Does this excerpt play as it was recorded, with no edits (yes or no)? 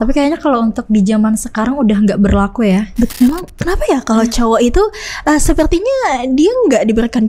no